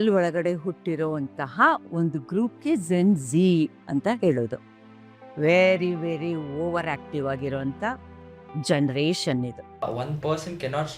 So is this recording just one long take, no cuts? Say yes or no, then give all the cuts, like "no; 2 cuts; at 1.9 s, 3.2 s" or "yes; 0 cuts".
no; 1 cut; at 9.9 s